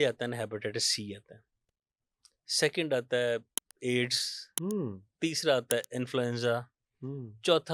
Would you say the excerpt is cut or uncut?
uncut